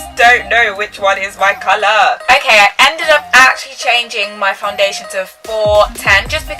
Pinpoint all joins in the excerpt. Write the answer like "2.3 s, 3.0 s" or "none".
2.2 s